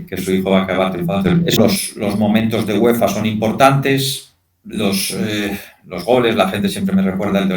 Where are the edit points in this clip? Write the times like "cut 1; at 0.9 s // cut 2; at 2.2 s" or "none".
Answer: cut 1; at 1.6 s